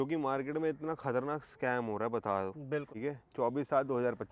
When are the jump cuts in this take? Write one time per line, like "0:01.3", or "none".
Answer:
0:02.9